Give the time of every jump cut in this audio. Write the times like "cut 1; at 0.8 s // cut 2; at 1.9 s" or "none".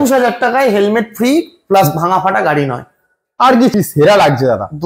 cut 1; at 3.7 s